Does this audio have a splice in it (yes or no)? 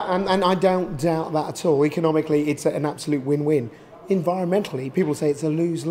yes